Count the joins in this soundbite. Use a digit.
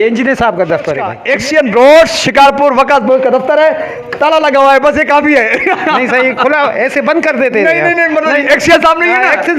1